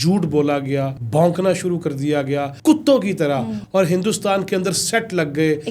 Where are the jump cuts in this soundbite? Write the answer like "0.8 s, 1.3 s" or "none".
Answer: 1.0 s, 2.5 s, 3.6 s

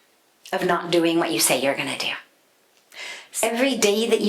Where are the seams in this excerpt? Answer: 3.2 s

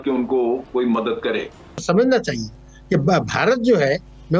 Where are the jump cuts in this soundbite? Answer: 1.8 s

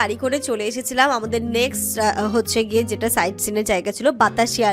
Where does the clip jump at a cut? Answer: none

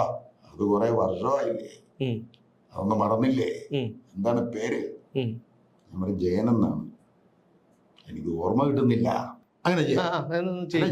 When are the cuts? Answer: 9.4 s

